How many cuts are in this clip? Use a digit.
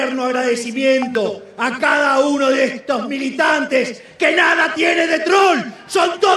0